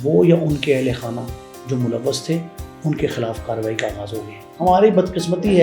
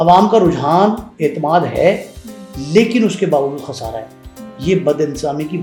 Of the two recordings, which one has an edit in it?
first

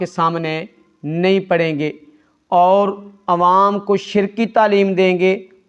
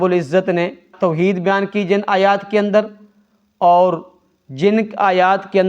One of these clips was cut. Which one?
second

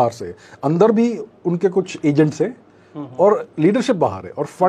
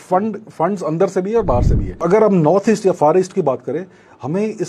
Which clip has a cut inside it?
second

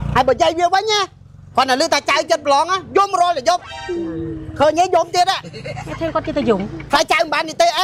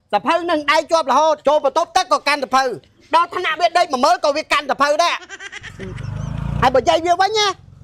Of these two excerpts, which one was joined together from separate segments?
second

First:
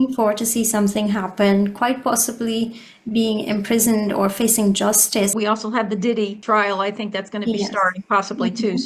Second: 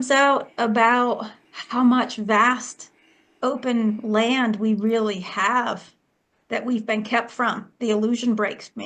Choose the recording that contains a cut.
first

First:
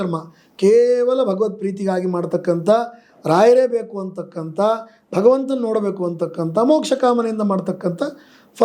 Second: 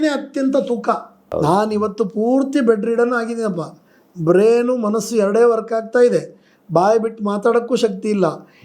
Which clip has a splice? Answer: second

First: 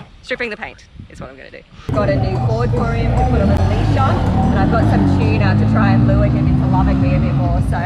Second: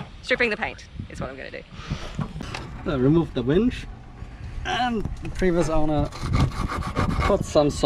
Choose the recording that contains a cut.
first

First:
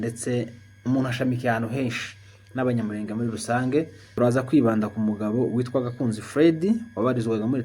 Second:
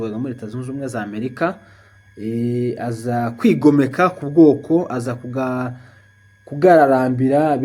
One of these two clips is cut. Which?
first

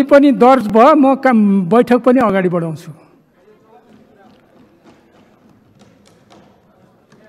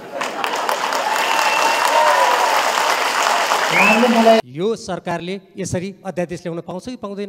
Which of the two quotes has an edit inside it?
second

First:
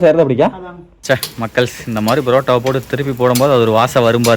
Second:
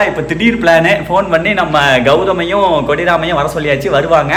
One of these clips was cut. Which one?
first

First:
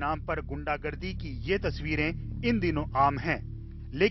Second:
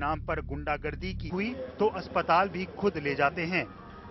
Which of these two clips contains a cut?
first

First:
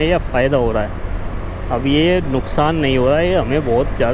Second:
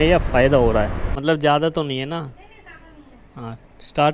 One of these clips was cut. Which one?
second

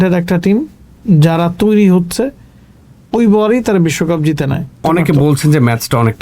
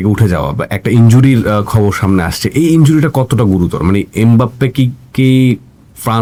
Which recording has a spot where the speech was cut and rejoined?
first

